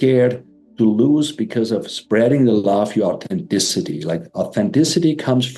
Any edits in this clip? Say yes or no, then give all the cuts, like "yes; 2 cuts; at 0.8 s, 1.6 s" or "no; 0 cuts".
no; 0 cuts